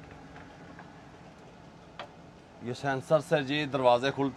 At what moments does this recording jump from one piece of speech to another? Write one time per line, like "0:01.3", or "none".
none